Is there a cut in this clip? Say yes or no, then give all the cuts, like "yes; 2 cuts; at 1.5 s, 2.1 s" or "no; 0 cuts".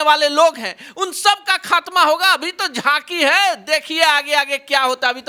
no; 0 cuts